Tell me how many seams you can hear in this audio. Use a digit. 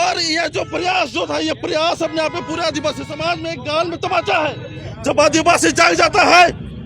1